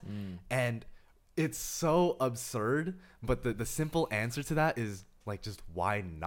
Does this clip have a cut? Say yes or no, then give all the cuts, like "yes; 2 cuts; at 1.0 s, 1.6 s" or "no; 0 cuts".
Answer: no; 0 cuts